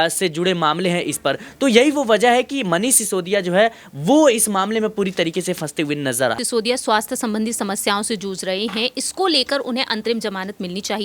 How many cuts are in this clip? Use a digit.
1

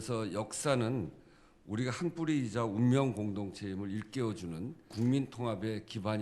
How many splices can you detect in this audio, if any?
1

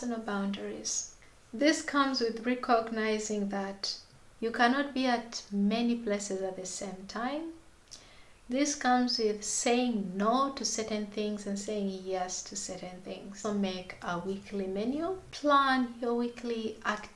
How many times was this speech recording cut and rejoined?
2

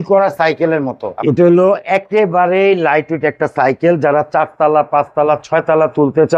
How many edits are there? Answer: 1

